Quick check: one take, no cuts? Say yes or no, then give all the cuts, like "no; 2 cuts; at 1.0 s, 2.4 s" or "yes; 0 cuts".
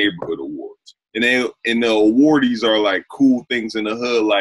yes; 0 cuts